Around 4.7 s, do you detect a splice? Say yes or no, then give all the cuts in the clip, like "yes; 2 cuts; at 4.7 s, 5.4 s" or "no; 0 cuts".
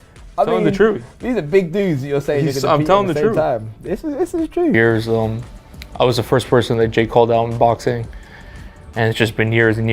no; 0 cuts